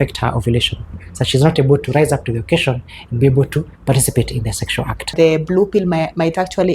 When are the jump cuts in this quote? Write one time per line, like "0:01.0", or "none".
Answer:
0:01.1
0:05.1